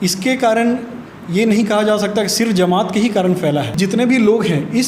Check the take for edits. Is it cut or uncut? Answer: cut